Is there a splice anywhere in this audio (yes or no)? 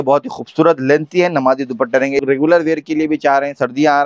yes